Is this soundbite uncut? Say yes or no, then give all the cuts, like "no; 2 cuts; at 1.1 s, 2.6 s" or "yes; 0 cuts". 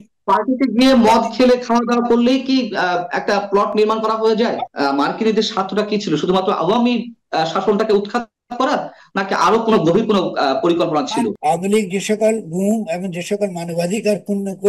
no; 2 cuts; at 4.6 s, 11.4 s